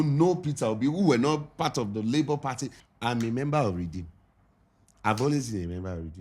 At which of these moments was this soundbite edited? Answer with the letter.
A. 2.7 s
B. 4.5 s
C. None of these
A